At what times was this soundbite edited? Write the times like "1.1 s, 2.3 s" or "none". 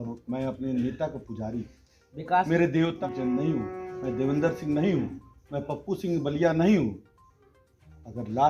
3.0 s